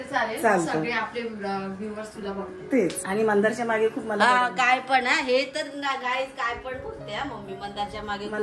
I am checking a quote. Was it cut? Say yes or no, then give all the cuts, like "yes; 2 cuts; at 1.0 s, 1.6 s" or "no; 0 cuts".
yes; 1 cut; at 3.0 s